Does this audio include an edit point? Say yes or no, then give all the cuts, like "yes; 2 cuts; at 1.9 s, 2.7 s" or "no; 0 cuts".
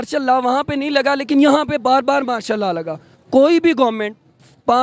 no; 0 cuts